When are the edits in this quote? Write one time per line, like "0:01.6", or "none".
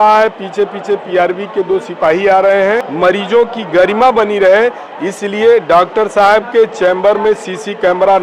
0:02.9